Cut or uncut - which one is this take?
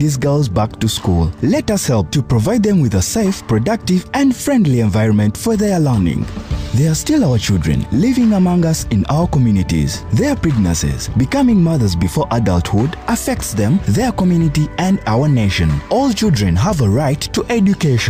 uncut